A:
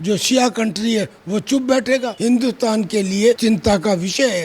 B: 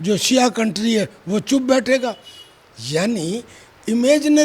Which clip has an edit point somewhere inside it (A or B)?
A